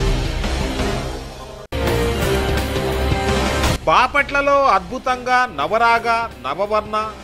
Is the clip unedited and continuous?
no; 2 cuts; at 1.7 s, 3.8 s

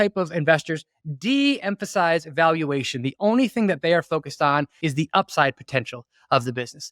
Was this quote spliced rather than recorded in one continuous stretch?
yes; 1 cut; at 4.7 s

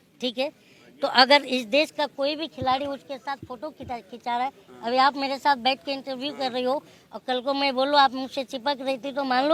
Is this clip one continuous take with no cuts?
yes; 0 cuts

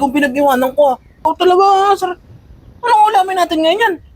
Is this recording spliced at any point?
yes; 1 cut; at 1.2 s

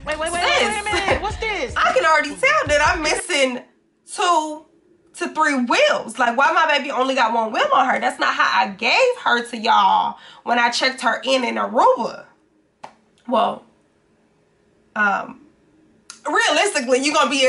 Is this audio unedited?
yes; 0 cuts

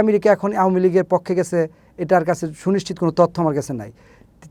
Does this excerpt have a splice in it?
no; 0 cuts

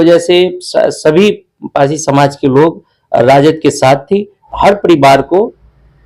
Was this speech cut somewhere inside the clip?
yes; 1 cut; at 4.4 s

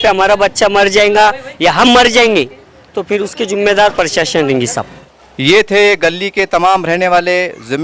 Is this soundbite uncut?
yes; 0 cuts

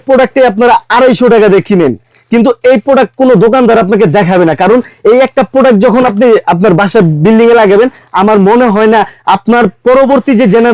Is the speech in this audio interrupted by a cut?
no; 0 cuts

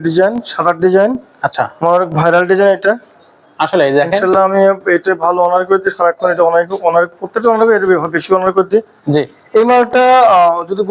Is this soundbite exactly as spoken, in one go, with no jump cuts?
yes; 0 cuts

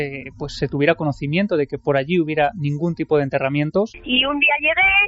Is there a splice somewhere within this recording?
yes; 1 cut; at 4.0 s

